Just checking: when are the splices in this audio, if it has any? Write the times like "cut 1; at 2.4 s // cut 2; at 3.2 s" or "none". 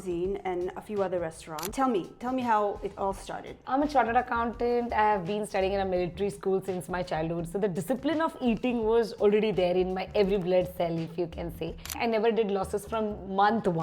cut 1; at 1.6 s // cut 2; at 3.6 s // cut 3; at 11.9 s

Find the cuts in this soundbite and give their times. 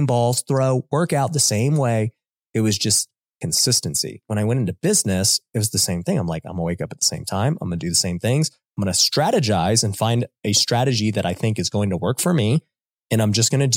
cut 1; at 4.2 s

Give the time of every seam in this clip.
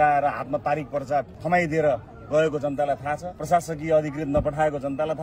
cut 1; at 1.4 s // cut 2; at 3.3 s

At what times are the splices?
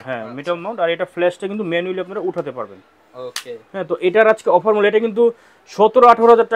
none

